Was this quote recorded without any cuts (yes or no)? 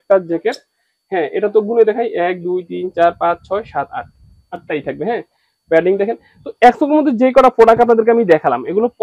yes